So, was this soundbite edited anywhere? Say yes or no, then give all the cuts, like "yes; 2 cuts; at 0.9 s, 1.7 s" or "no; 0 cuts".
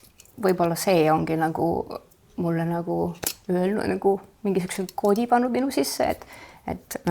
no; 0 cuts